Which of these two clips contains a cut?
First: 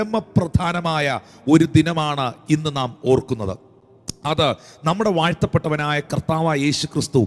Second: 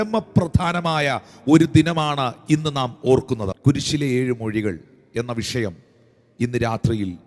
second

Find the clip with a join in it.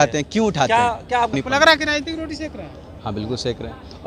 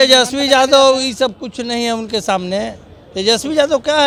first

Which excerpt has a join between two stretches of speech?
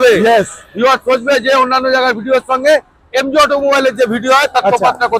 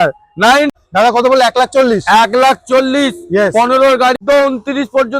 second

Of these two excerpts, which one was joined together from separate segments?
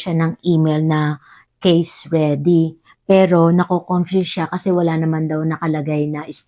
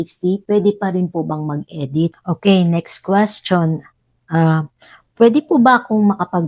second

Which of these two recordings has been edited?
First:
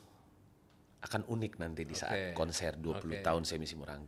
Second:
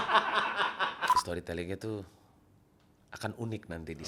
second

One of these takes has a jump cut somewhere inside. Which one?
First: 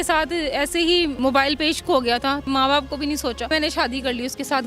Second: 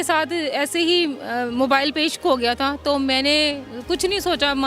first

